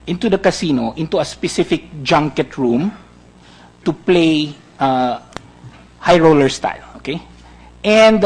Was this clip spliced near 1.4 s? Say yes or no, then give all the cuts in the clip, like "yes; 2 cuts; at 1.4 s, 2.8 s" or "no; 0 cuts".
yes; 1 cut; at 1.4 s